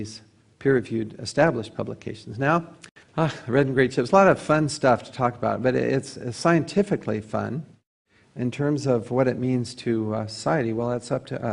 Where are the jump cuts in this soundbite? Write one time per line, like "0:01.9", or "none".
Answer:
0:08.8